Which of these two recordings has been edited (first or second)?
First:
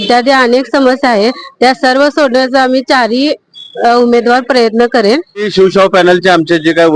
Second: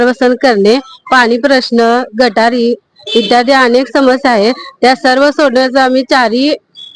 first